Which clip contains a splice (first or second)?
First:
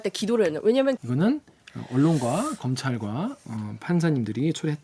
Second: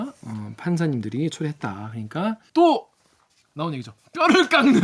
first